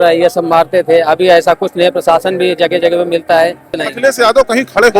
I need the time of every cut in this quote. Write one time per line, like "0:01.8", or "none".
0:03.8